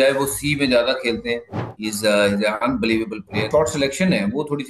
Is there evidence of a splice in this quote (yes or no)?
yes